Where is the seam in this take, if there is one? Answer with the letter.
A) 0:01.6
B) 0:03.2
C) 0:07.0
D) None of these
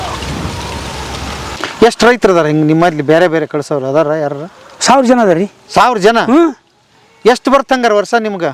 A